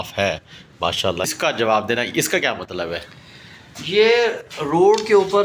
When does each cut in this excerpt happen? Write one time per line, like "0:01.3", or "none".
0:01.3